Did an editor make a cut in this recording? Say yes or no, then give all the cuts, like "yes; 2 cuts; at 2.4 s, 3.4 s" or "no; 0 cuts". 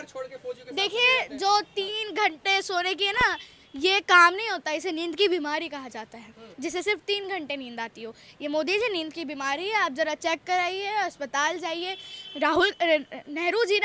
no; 0 cuts